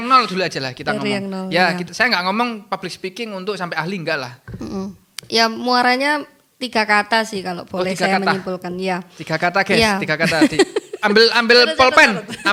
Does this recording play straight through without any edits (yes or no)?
yes